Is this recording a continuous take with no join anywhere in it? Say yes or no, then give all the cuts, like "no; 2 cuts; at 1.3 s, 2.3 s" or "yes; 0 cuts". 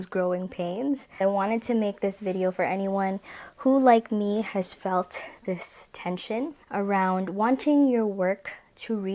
no; 1 cut; at 1.2 s